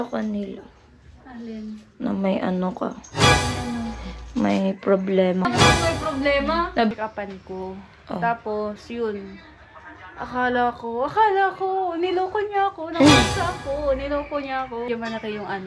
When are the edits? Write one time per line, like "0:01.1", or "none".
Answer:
0:06.9
0:14.9